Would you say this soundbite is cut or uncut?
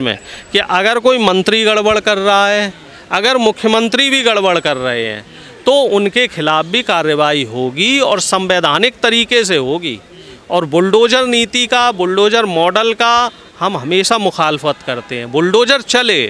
uncut